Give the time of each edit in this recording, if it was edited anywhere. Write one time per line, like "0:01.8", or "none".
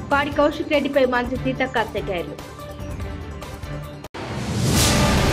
none